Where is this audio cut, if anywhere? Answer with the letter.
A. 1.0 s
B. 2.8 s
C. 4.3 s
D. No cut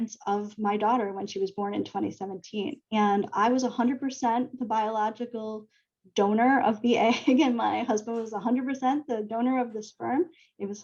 B